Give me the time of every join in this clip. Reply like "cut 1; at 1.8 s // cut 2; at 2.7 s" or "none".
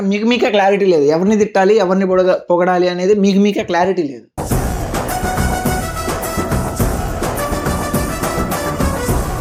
none